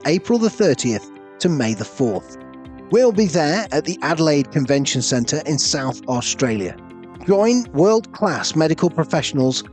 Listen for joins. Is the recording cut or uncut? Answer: uncut